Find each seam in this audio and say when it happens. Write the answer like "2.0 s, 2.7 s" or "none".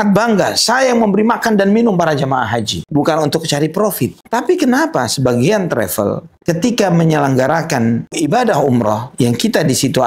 2.8 s, 4.2 s, 6.3 s, 8.2 s